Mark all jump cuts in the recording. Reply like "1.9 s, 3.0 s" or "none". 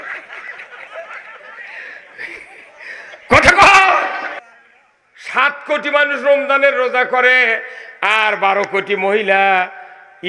4.3 s